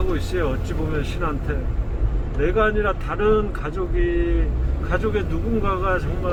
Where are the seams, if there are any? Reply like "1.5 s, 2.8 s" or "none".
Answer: none